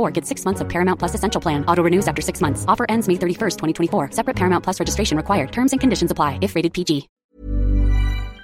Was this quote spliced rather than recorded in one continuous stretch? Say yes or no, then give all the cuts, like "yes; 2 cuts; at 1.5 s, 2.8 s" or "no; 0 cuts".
yes; 1 cut; at 7.1 s